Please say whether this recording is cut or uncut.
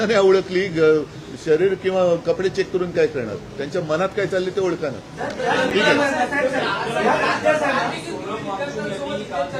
uncut